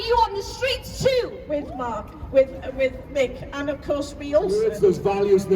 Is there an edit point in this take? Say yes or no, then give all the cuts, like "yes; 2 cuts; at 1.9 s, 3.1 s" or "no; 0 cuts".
yes; 2 cuts; at 1.4 s, 4.6 s